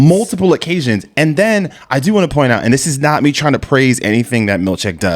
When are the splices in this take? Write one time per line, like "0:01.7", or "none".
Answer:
none